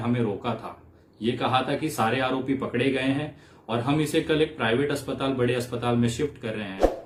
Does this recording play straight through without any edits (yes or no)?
yes